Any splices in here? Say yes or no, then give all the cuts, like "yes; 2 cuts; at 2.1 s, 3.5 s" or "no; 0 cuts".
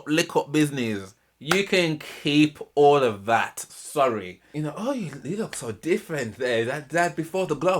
yes; 1 cut; at 4.5 s